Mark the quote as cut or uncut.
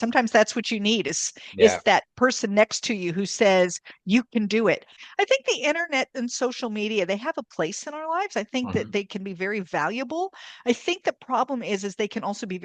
cut